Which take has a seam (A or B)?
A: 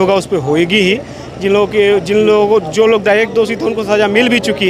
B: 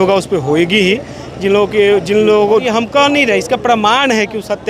B